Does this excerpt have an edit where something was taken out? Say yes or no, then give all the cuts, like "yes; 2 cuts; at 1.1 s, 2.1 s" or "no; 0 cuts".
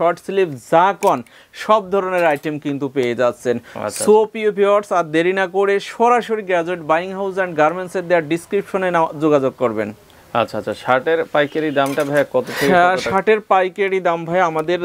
no; 0 cuts